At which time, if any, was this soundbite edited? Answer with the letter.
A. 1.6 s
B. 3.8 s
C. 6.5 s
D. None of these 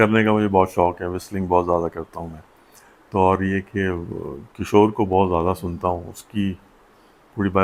D